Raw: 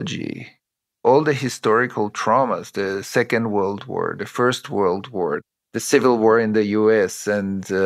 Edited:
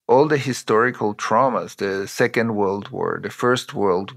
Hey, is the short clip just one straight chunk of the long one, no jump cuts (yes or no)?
yes